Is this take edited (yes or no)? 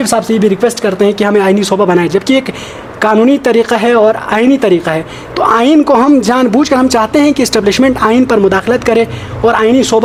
no